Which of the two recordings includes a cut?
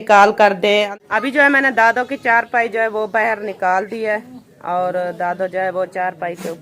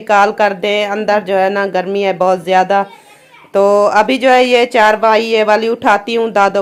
first; 1 cut; at 1.0 s

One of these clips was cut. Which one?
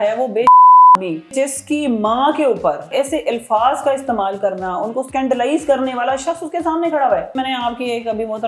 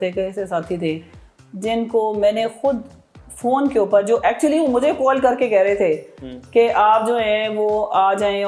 first; 4 cuts; at 1.3 s, 2.9 s, 5.1 s, 7.3 s

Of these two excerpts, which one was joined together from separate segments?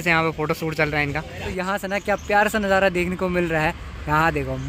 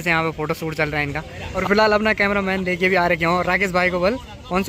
first; 1 cut; at 1.4 s

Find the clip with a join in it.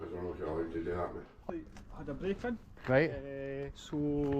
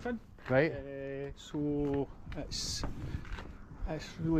first; 1 cut; at 1.4 s

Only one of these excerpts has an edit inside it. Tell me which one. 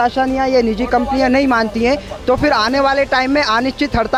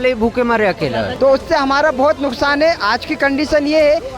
second; 1 cut; at 1.1 s

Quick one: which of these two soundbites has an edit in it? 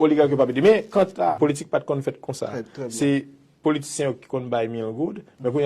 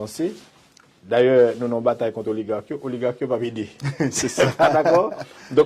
first; 1 cut; at 1.3 s

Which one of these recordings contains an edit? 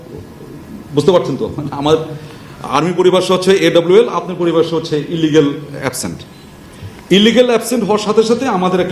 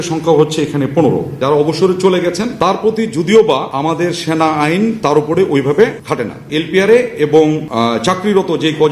second; 6 cuts; at 1.3 s, 2.5 s, 3.7 s, 5.0 s, 6.3 s, 7.7 s

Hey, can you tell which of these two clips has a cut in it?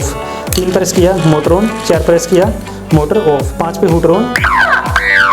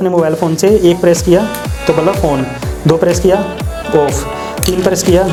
first; 1 cut; at 3.5 s

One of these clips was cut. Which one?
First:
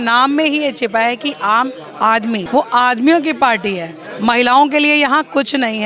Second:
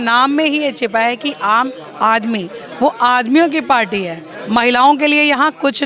first; 1 cut; at 2.4 s

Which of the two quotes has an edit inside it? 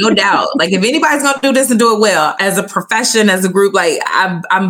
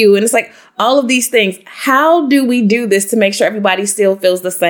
first; 1 cut; at 2.3 s

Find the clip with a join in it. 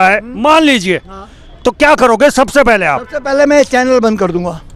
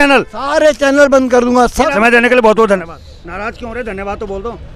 second; 1 cut; at 1.9 s

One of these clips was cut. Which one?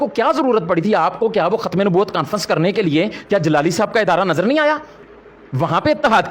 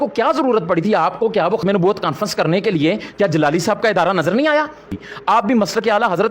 second; 2 cuts; at 1.6 s, 5.1 s

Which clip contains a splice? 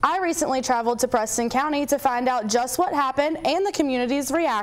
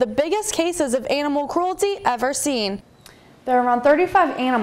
second; 1 cut; at 2.9 s

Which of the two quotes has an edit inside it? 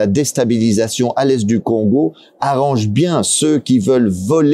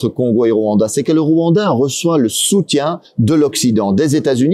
second; 1 cut; at 3.0 s

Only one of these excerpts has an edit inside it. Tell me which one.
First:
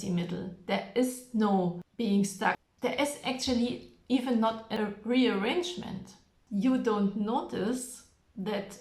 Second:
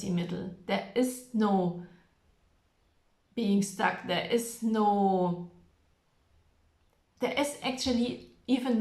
first; 4 cuts; at 1.8 s, 2.6 s, 4.7 s, 6.4 s

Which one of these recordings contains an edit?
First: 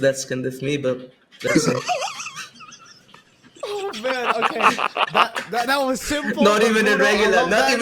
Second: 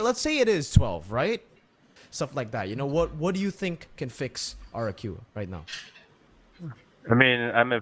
second; 1 cut; at 2.0 s

